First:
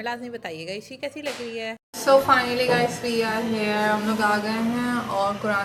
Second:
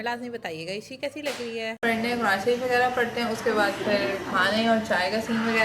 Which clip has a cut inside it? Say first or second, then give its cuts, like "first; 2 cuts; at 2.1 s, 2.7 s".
second; 1 cut; at 1.8 s